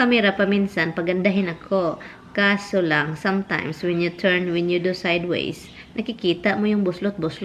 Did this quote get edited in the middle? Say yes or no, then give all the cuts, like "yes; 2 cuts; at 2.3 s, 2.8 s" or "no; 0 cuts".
no; 0 cuts